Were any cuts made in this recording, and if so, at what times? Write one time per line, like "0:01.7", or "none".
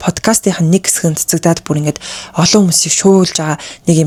none